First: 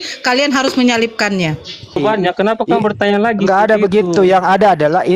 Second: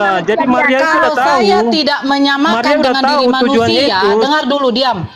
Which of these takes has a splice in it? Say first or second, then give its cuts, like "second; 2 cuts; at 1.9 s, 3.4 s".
first; 1 cut; at 2.0 s